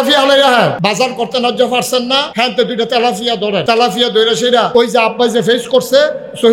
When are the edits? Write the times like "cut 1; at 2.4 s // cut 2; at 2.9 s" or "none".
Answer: cut 1; at 0.8 s // cut 2; at 2.3 s // cut 3; at 3.6 s // cut 4; at 4.7 s